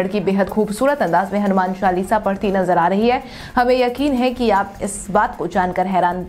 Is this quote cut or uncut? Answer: uncut